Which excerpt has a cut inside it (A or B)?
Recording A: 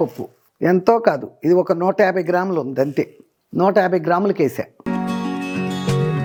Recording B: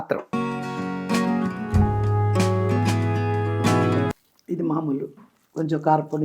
B